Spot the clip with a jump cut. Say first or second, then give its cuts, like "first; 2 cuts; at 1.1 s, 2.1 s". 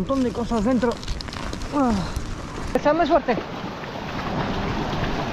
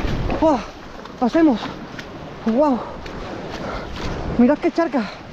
first; 1 cut; at 2.8 s